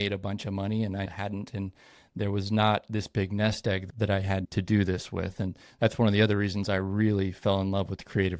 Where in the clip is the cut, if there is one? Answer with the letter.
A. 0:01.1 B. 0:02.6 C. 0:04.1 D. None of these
A